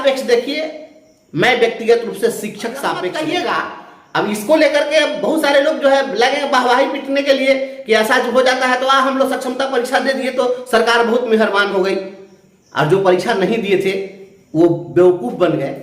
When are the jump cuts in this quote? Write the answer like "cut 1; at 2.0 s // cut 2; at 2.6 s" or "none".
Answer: cut 1; at 3.1 s

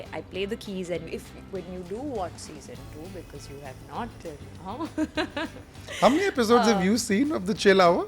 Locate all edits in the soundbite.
cut 1; at 1.1 s

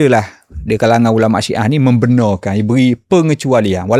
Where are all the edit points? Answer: none

